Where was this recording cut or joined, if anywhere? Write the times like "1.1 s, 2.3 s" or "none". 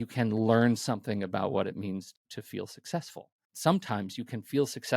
2.1 s, 3.4 s